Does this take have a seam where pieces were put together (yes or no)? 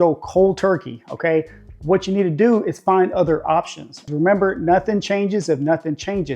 yes